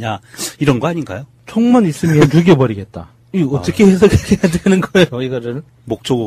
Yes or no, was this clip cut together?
yes